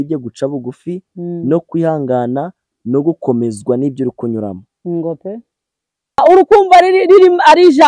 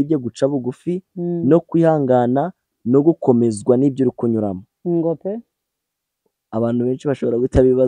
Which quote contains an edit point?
first; 1 cut; at 6.2 s

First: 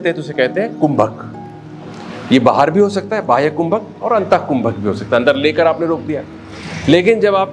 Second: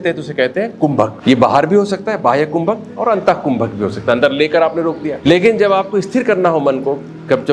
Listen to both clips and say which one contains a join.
second; 2 cuts; at 1.2 s, 5.1 s

